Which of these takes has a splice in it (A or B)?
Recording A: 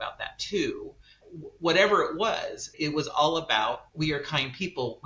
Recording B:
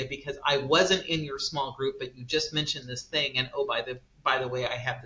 A